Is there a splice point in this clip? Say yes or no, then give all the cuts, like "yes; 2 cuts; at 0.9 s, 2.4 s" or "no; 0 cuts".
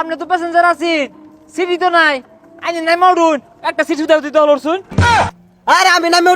yes; 1 cut; at 5.1 s